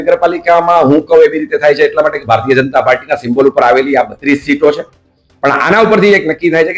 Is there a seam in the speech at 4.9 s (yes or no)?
no